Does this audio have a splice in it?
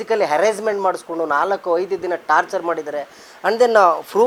no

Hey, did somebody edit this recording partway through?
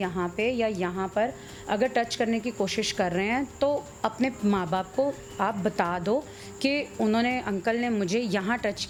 no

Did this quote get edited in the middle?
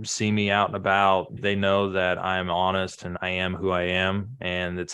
yes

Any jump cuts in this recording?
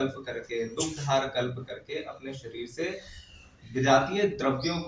no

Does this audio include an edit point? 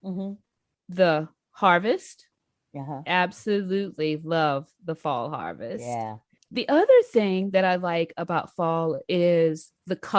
yes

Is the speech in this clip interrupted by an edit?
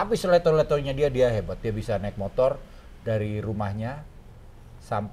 no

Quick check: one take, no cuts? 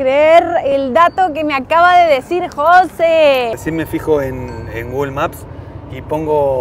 no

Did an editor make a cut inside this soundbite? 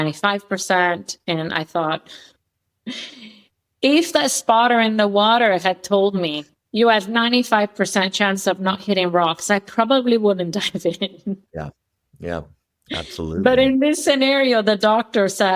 no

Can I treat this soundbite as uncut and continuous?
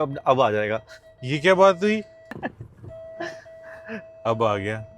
no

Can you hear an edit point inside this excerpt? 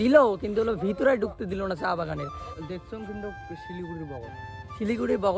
yes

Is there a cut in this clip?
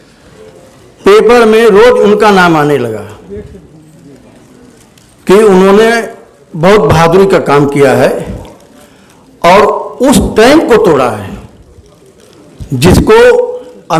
no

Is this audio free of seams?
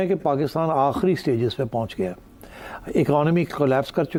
yes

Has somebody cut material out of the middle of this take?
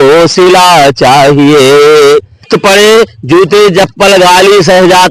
yes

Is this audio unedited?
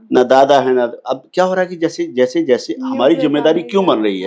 yes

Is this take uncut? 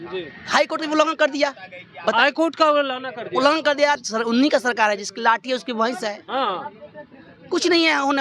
no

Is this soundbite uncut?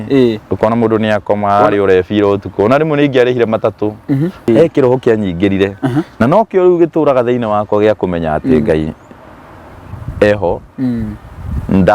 no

